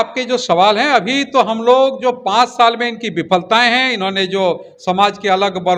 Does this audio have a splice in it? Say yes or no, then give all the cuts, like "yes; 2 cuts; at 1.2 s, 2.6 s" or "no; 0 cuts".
no; 0 cuts